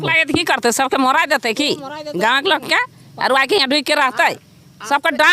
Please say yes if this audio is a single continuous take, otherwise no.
yes